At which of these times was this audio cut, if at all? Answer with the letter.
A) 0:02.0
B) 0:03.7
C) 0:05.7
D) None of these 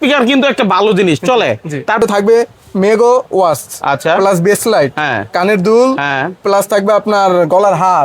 A